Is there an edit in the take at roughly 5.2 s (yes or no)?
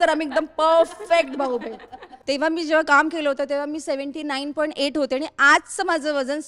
no